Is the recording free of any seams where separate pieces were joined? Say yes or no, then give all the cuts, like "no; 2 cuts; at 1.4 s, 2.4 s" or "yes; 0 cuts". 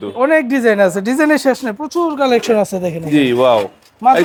yes; 0 cuts